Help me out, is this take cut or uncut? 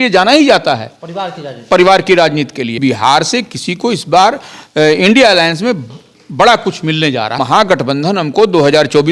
cut